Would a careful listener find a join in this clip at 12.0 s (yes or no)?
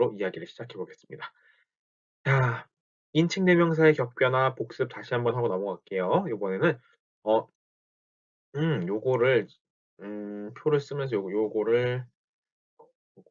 no